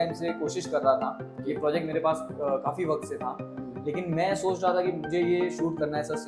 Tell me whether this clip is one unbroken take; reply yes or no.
yes